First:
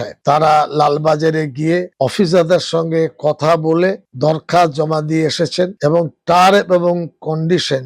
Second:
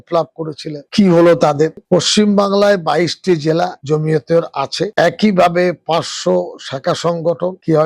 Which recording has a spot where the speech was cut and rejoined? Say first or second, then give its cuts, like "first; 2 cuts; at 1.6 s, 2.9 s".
second; 1 cut; at 1.7 s